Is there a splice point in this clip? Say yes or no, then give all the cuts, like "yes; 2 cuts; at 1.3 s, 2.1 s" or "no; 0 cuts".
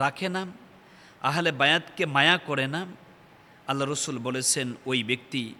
no; 0 cuts